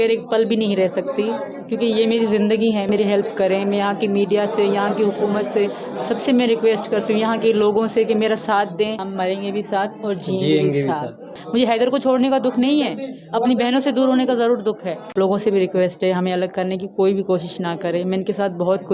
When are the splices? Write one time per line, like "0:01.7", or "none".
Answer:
0:02.9
0:09.0
0:11.3
0:15.1